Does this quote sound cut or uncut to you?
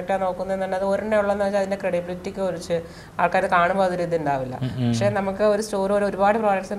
uncut